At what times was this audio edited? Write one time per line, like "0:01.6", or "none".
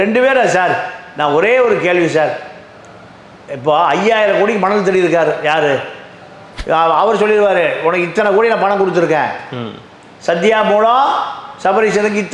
0:06.5